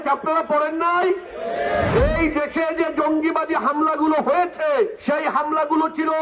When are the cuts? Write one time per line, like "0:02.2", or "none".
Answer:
0:01.9
0:05.0